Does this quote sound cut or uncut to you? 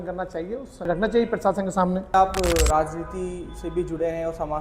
cut